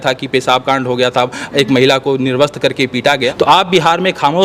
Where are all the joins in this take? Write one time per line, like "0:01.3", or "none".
0:03.3

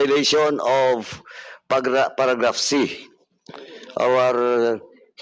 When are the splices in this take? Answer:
none

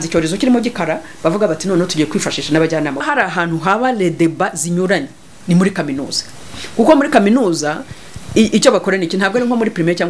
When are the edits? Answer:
0:03.0

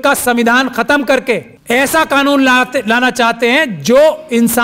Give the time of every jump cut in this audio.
0:01.5

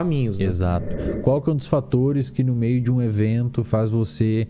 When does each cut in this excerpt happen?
0:01.0

